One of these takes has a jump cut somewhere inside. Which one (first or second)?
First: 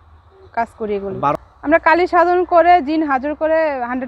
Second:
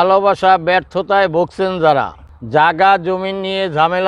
first